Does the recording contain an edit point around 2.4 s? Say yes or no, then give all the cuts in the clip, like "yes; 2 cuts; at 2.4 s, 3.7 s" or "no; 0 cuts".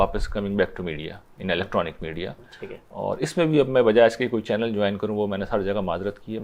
no; 0 cuts